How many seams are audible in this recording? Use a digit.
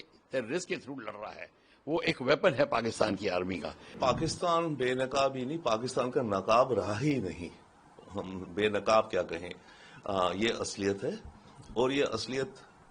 1